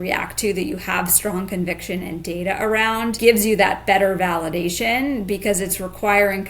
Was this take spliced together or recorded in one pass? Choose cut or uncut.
cut